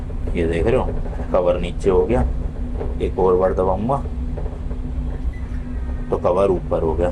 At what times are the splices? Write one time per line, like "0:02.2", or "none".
none